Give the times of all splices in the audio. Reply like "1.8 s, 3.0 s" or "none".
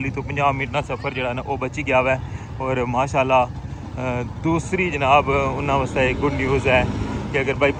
none